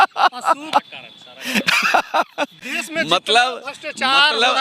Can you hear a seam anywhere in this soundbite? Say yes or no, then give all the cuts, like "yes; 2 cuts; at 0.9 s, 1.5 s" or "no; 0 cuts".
no; 0 cuts